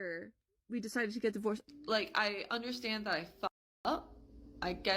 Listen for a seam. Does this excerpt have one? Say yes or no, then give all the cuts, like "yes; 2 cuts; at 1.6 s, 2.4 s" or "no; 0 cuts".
yes; 1 cut; at 1.7 s